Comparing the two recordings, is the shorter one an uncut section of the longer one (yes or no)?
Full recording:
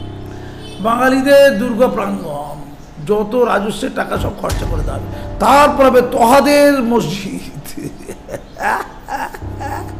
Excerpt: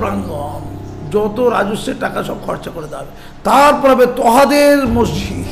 yes